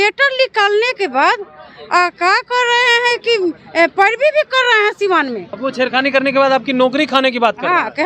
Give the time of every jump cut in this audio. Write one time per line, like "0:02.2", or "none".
0:05.5